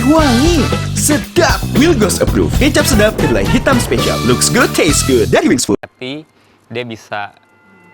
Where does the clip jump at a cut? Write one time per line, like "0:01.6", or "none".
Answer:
0:05.9